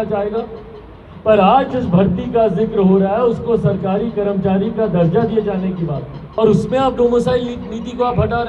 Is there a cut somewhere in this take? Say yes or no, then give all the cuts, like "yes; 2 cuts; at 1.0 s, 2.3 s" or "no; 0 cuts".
yes; 1 cut; at 6.1 s